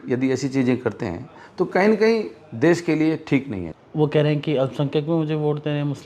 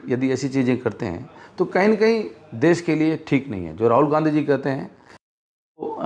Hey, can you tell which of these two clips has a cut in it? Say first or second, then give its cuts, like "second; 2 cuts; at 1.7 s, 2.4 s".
first; 1 cut; at 3.7 s